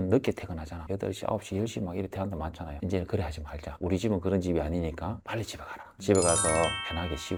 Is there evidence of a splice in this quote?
no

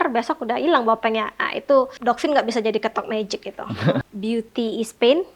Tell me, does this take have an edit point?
yes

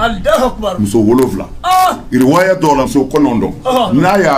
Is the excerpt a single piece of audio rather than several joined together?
no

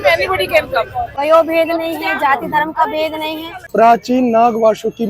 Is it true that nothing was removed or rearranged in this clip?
no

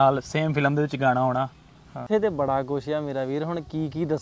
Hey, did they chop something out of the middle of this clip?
yes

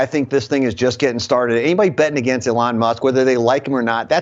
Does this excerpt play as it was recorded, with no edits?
yes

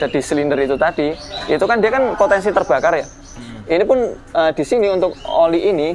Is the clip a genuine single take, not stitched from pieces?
yes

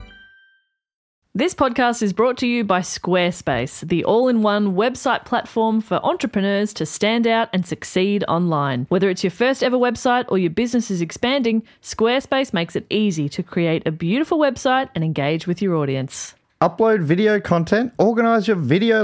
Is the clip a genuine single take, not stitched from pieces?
no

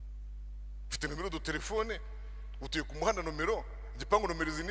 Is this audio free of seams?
yes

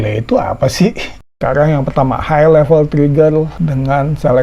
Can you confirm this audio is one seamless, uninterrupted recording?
no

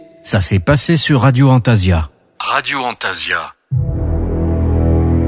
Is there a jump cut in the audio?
no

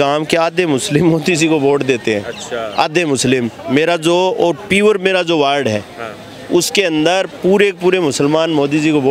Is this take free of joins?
yes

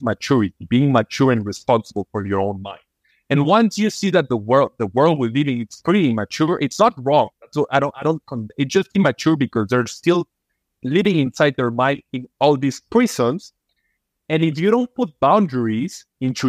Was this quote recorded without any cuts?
yes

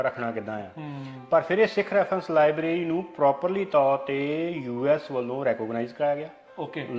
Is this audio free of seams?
yes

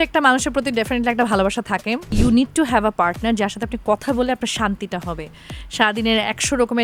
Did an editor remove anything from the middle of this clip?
yes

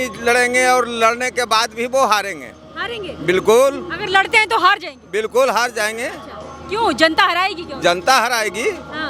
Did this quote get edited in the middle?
no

